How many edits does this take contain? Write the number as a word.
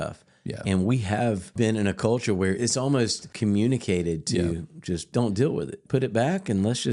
four